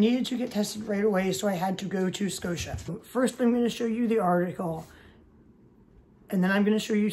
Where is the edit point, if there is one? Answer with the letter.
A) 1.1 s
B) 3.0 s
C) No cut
B